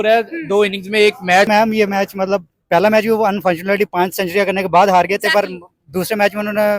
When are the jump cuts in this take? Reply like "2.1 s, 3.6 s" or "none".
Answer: 1.5 s

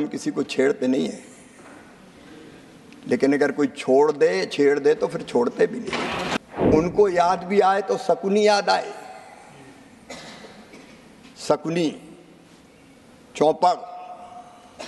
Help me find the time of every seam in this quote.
6.4 s

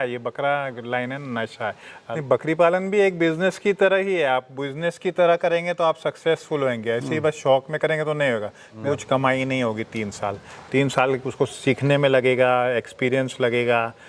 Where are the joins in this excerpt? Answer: 1.9 s, 8.7 s

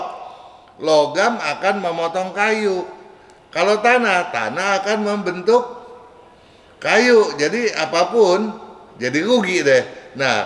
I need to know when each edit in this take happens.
none

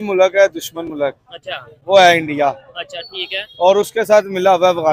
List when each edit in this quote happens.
none

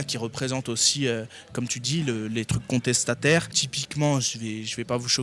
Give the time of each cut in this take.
3.6 s

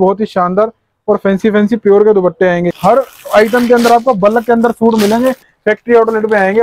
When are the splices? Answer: 2.7 s, 5.5 s

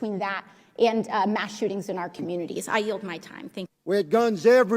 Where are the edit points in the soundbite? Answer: 3.7 s

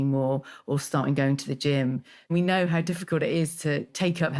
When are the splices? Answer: 2.3 s

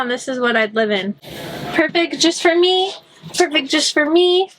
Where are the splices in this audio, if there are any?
1.3 s

